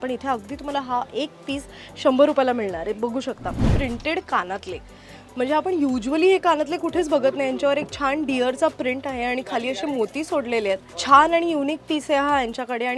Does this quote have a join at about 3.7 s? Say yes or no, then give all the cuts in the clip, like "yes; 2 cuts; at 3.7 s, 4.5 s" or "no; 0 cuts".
yes; 2 cuts; at 3.7 s, 10.9 s